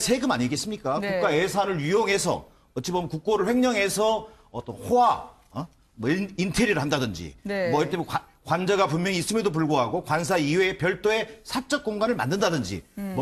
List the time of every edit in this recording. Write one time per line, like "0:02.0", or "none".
0:09.7